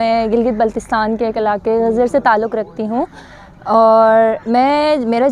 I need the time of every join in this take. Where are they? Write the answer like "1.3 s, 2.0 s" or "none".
none